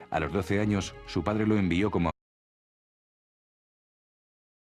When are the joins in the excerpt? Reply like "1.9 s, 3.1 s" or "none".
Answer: none

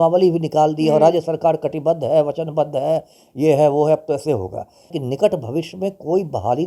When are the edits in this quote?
5.0 s

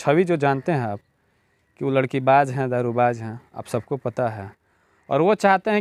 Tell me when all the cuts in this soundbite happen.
none

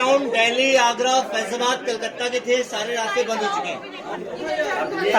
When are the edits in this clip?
4.2 s

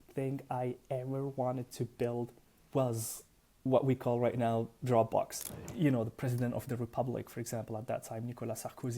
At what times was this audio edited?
5.6 s

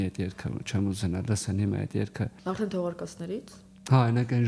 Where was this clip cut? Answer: none

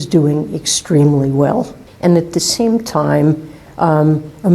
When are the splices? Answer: 1.8 s

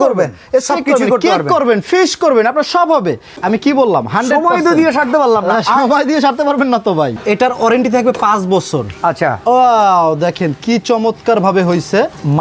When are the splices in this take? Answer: 3.3 s, 7.2 s

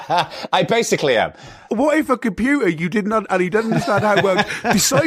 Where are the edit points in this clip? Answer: 1.7 s

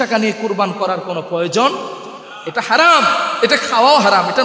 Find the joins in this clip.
none

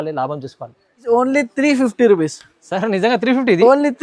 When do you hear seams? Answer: 1.0 s

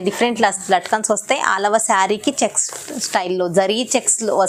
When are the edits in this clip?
none

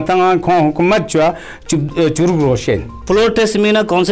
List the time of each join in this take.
3.0 s

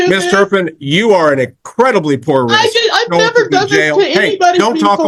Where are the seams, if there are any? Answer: none

